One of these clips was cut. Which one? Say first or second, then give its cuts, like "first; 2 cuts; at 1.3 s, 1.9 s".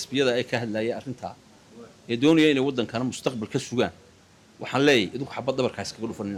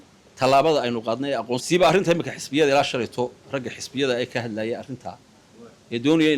second; 1 cut; at 1.6 s